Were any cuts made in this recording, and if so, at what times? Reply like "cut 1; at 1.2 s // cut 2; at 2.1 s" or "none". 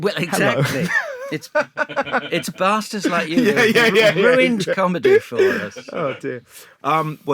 none